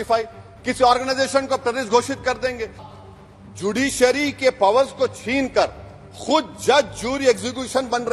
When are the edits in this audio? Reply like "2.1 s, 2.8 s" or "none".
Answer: 2.9 s